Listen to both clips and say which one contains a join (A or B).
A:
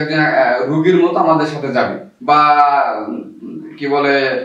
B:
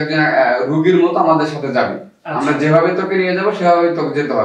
A